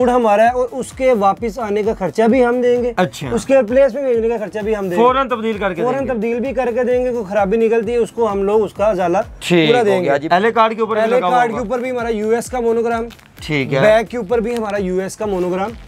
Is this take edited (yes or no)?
yes